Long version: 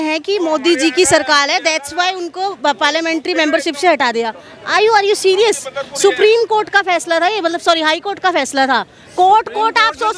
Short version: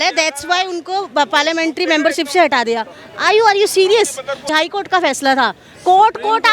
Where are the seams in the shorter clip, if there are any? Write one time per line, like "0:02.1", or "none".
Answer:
0:04.5

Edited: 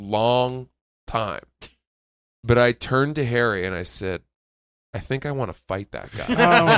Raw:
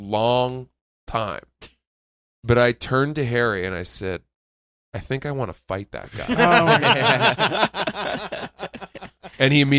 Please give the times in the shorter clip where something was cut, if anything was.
none

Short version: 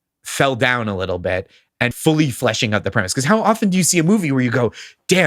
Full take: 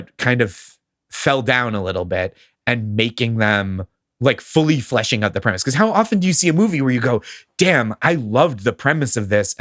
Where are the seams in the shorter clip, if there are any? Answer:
0:02.0

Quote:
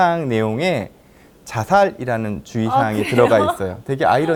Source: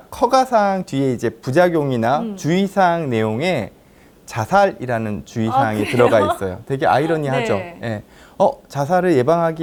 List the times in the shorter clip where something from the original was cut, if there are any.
none

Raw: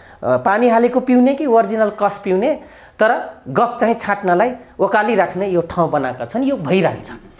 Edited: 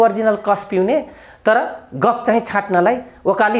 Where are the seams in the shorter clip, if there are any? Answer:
none

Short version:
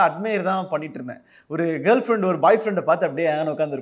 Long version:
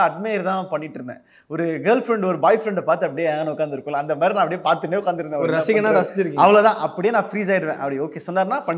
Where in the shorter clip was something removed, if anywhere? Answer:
none

